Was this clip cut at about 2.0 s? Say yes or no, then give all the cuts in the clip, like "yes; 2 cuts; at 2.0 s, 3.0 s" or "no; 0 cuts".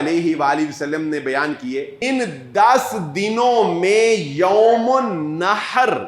yes; 1 cut; at 2.0 s